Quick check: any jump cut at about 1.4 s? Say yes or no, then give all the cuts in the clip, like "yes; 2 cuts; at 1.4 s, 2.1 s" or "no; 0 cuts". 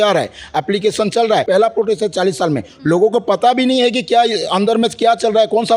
yes; 1 cut; at 1.4 s